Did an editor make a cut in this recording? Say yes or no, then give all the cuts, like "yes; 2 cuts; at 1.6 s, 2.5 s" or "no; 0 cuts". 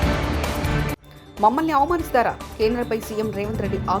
yes; 1 cut; at 1.2 s